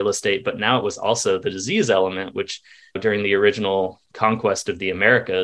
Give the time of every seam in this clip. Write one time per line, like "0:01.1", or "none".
none